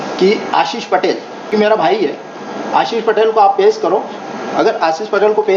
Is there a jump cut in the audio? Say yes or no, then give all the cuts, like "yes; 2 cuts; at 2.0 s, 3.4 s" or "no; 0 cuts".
yes; 1 cut; at 1.5 s